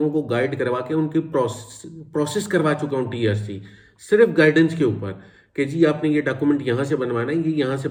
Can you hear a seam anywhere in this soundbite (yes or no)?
no